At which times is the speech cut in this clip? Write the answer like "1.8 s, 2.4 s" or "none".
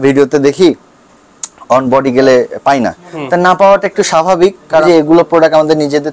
4.8 s